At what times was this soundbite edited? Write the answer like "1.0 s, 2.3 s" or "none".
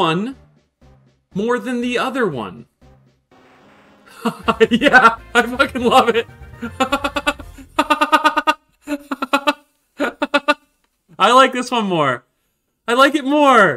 11.0 s